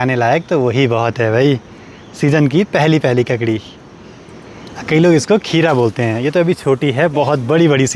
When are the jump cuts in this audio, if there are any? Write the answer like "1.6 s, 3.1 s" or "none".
none